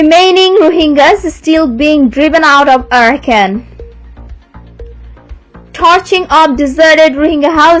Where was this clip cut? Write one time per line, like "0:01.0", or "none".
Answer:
none